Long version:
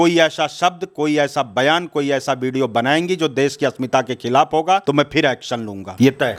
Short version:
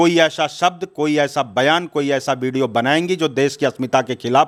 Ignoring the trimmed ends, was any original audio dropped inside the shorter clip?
no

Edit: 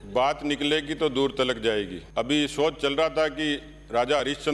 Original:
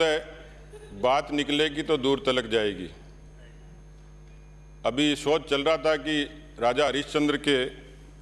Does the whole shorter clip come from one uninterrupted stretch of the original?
no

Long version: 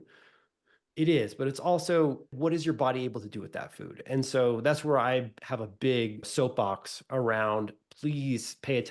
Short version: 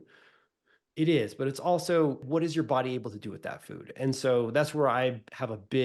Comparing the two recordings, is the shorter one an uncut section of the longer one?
no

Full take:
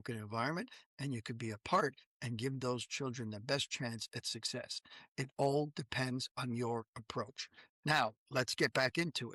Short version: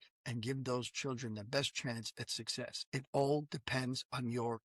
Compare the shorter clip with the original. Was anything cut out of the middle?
yes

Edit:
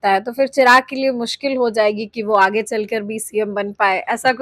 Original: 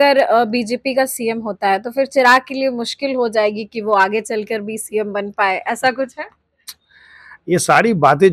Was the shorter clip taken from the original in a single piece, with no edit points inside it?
yes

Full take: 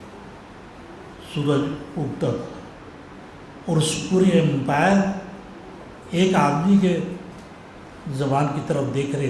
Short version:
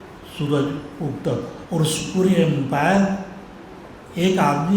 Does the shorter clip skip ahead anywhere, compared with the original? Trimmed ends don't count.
yes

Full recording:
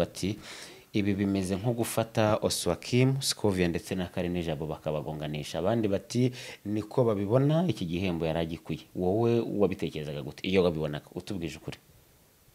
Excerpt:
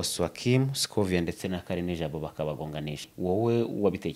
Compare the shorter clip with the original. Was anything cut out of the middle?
yes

